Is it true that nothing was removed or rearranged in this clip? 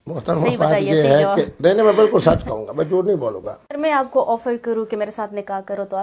no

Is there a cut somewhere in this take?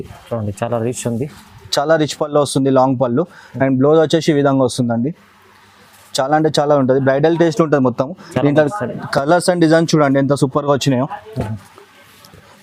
no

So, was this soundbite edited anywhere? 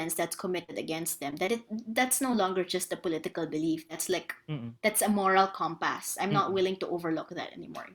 no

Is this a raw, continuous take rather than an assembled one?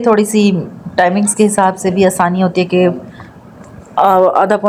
yes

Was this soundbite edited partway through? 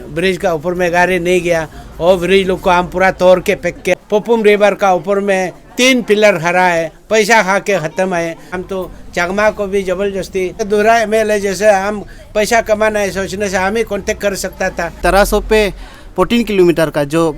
yes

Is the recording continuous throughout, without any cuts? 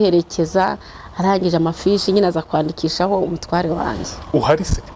yes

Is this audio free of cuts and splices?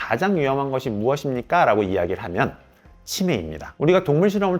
yes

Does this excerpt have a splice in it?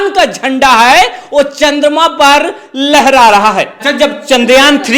yes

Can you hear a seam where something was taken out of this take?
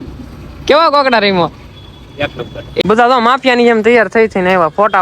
yes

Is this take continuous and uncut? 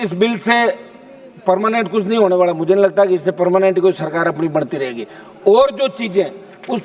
yes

